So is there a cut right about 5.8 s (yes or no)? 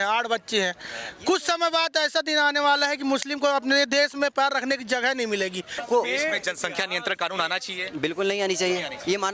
yes